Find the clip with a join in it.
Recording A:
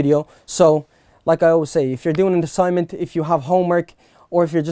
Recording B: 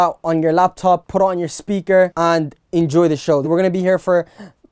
B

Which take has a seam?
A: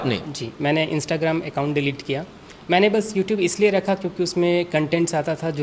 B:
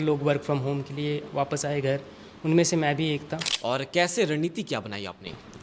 B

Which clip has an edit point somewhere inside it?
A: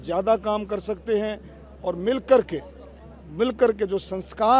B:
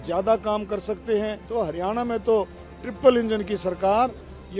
B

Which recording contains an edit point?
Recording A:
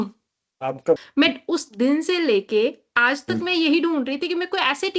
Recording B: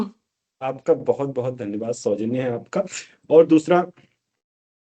A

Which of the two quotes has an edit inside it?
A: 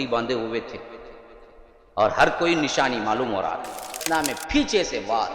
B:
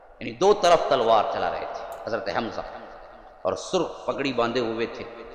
A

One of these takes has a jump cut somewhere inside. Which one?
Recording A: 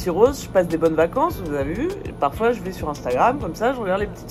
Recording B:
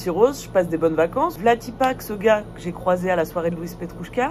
B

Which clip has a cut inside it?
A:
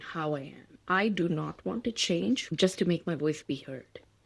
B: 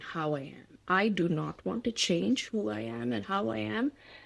A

